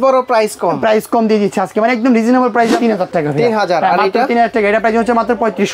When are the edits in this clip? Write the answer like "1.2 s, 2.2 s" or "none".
2.8 s